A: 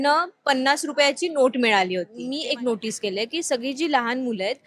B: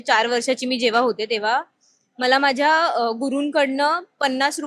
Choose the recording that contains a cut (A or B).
A